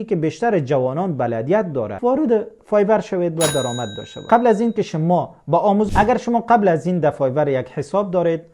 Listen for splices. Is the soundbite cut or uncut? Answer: cut